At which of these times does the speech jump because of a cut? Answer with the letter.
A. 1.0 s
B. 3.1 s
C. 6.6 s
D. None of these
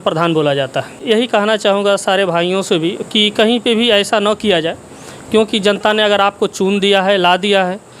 A